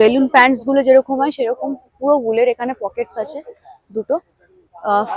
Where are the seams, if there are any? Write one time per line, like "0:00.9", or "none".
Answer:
none